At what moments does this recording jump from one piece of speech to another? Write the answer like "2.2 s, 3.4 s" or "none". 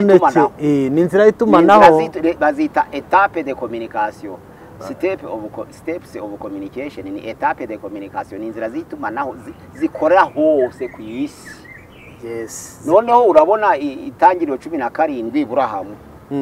none